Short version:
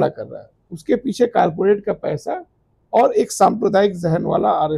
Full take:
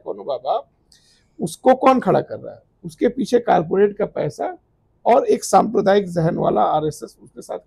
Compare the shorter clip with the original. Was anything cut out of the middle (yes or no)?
no